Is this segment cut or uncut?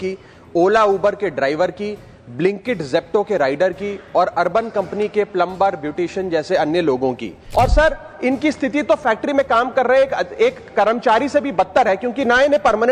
cut